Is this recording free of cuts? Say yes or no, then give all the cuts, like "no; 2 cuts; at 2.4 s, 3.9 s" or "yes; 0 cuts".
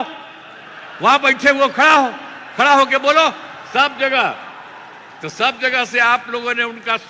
yes; 0 cuts